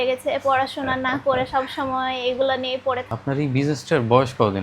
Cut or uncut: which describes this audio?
cut